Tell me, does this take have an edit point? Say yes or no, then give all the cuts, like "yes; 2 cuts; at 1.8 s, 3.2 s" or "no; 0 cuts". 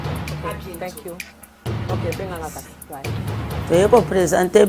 no; 0 cuts